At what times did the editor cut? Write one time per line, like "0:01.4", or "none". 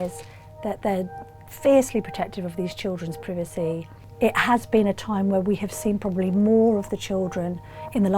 0:03.9